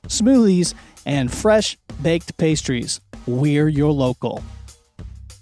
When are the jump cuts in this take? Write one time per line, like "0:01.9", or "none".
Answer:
0:04.4